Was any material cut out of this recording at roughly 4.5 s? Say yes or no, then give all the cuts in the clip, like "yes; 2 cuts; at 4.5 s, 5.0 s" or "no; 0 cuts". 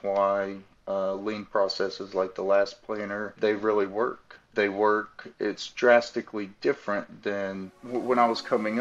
yes; 2 cuts; at 3.4 s, 4.5 s